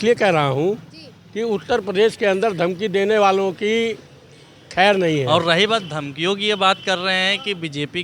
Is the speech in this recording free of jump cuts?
no; 1 cut; at 5.5 s

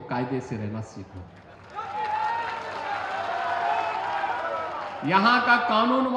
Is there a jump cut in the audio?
no; 0 cuts

